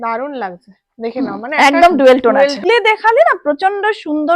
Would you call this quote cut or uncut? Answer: cut